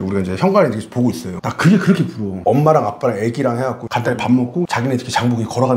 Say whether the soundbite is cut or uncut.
cut